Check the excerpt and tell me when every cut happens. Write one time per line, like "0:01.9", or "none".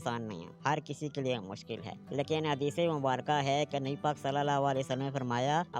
none